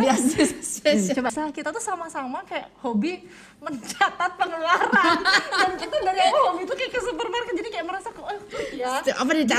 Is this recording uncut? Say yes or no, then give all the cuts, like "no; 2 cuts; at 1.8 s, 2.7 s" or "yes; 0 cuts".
no; 1 cut; at 1.3 s